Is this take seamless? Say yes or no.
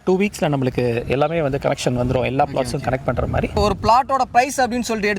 no